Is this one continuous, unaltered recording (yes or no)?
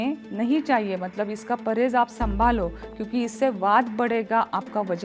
yes